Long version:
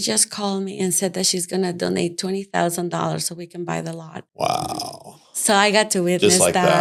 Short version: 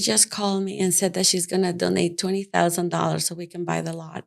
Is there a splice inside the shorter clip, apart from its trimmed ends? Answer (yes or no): no